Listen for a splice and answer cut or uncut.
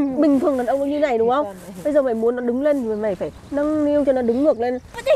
uncut